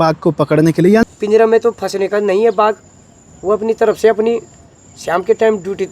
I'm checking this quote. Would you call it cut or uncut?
cut